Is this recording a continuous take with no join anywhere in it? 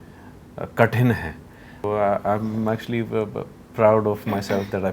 no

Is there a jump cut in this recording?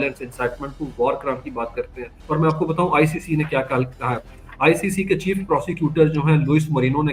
yes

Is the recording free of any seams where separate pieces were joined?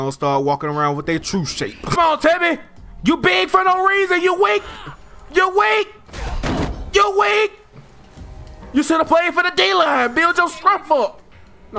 no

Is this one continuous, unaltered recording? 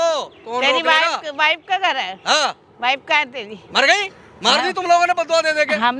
yes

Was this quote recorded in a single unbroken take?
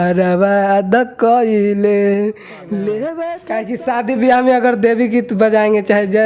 no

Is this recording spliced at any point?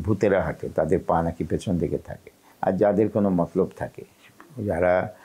no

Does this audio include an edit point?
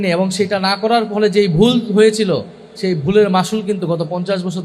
no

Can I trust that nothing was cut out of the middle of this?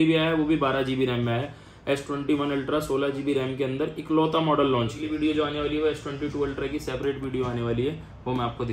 no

